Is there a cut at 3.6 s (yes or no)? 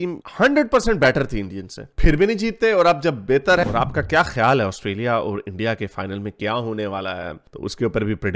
yes